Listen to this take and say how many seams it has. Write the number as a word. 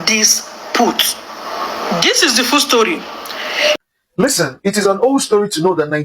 one